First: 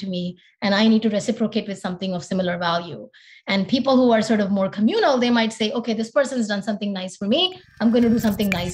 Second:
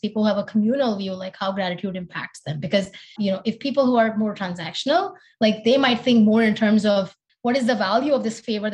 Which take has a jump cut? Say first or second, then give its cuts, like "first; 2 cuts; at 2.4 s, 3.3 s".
second; 2 cuts; at 3.1 s, 7.2 s